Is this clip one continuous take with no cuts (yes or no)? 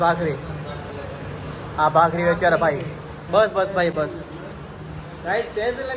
yes